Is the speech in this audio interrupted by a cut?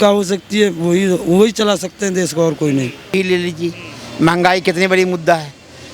yes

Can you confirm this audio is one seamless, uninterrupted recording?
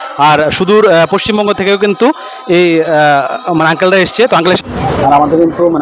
no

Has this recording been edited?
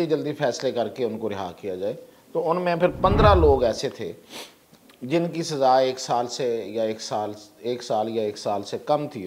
no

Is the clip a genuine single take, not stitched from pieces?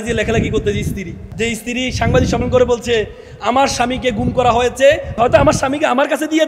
no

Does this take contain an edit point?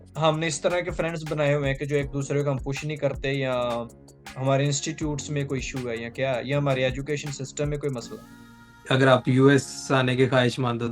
yes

